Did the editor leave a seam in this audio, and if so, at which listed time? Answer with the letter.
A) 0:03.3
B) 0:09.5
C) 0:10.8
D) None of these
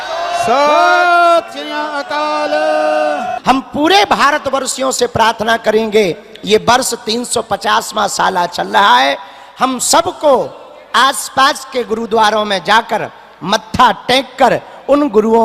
A